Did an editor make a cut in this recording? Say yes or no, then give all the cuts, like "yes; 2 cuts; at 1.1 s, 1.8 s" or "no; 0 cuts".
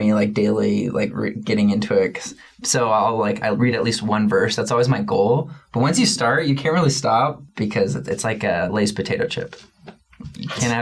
yes; 2 cuts; at 7.4 s, 9.9 s